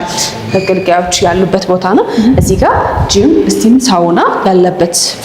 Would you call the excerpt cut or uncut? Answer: uncut